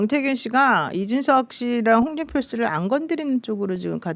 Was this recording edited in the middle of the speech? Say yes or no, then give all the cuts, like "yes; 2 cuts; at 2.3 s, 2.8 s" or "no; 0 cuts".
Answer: no; 0 cuts